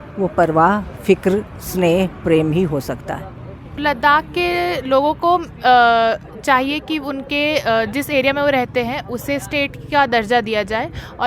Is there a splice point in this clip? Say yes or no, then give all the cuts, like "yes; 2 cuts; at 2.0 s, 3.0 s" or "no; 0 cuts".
yes; 1 cut; at 3.7 s